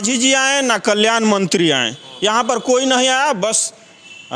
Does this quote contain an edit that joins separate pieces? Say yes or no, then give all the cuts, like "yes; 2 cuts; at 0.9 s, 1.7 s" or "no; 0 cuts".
no; 0 cuts